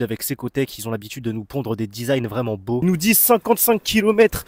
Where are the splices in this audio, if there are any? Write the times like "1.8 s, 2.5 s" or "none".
2.8 s